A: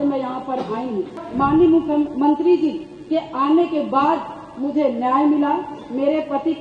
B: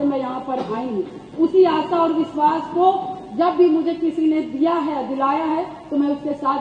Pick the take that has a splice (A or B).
A